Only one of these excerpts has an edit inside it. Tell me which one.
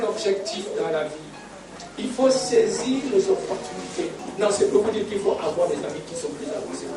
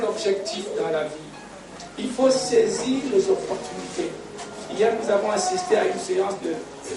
first; 1 cut; at 4.2 s

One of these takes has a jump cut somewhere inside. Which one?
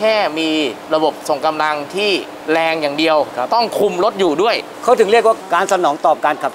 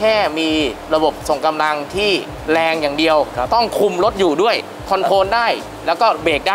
first; 1 cut; at 4.7 s

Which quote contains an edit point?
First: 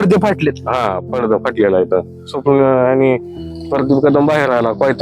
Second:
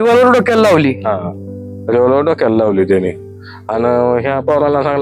first; 1 cut; at 2.3 s

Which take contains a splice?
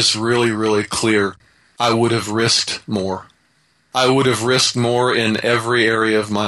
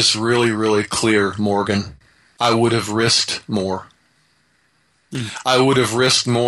first; 2 cuts; at 1.3 s, 3.8 s

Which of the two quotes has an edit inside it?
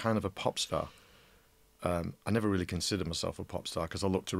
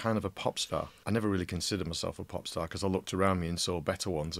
second; 1 cut; at 1.0 s

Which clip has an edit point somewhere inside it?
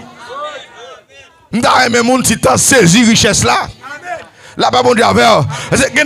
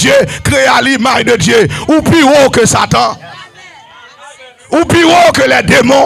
first; 1 cut; at 1.4 s

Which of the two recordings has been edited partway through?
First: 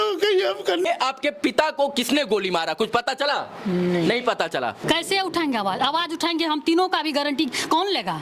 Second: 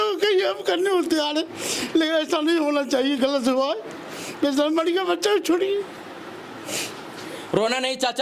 first; 2 cuts; at 0.8 s, 4.8 s

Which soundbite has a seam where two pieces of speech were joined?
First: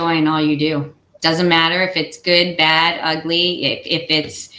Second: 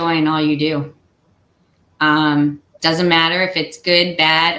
first; 1 cut; at 1.1 s

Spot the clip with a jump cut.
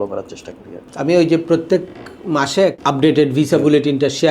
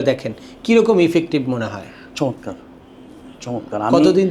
first; 1 cut; at 2.8 s

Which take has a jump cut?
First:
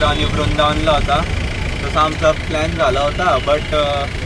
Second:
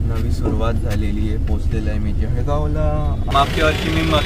second; 1 cut; at 3.3 s

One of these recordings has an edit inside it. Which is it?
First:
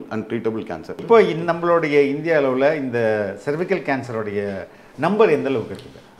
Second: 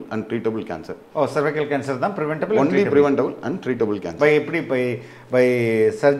first; 1 cut; at 1.0 s

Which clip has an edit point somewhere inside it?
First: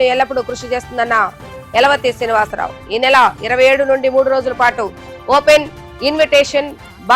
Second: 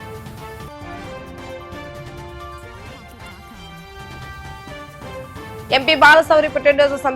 second; 2 cuts; at 1.0 s, 5.6 s

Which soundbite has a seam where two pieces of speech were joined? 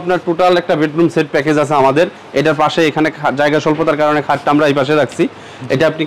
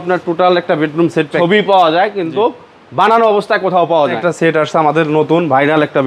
second; 2 cuts; at 1.3 s, 4.2 s

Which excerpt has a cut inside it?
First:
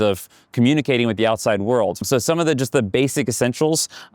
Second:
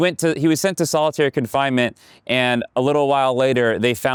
first; 1 cut; at 2.0 s

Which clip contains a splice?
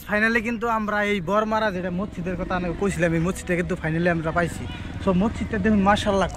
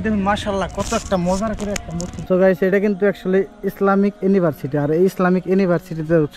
second; 1 cut; at 2.2 s

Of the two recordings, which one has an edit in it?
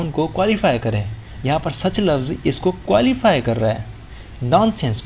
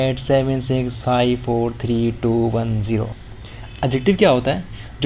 second; 1 cut; at 3.1 s

